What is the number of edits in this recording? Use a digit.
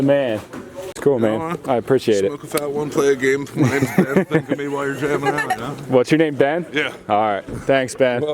1